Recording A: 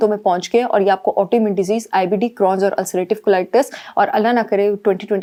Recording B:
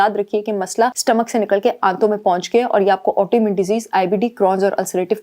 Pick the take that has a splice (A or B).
B